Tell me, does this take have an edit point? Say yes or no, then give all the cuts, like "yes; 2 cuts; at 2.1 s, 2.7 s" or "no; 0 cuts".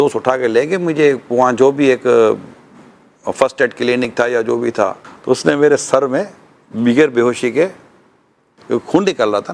yes; 1 cut; at 5.1 s